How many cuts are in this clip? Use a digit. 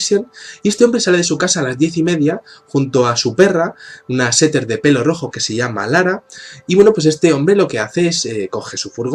1